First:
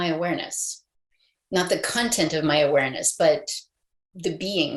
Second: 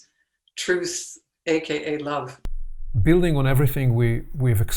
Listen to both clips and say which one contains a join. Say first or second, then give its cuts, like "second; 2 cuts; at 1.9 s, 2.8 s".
second; 1 cut; at 2.3 s